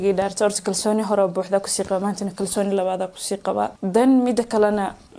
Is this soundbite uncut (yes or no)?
no